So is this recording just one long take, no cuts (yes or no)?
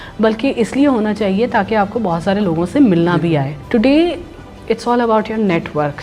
no